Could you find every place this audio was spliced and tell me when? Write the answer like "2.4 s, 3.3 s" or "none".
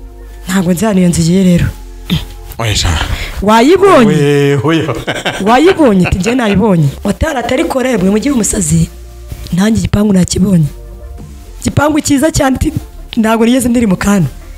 6.9 s